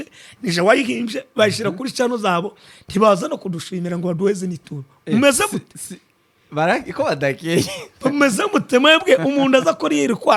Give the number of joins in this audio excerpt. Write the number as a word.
zero